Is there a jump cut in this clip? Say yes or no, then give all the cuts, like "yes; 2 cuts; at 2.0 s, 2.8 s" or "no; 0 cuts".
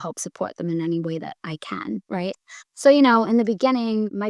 no; 0 cuts